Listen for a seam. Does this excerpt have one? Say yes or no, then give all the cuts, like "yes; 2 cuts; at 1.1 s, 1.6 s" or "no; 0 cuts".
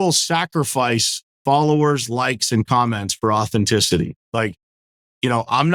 no; 0 cuts